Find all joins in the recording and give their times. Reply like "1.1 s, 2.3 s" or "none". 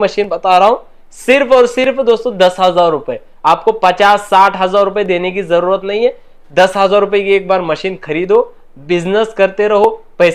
none